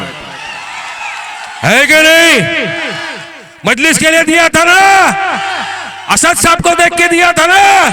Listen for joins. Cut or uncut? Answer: uncut